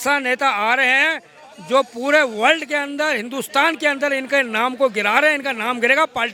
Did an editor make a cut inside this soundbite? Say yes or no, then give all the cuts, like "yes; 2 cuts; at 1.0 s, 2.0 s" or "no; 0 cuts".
no; 0 cuts